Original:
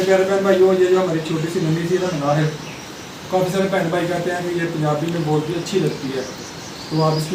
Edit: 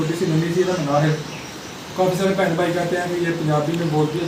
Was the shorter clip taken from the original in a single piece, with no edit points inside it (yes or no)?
yes